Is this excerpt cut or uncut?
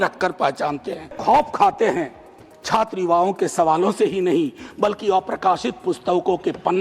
cut